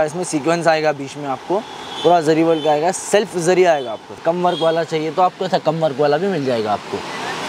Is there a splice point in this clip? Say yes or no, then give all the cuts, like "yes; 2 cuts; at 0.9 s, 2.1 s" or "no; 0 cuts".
yes; 1 cut; at 4.1 s